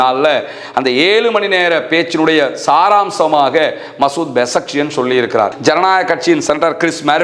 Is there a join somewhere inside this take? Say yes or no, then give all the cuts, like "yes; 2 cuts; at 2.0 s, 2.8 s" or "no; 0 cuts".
yes; 1 cut; at 5.5 s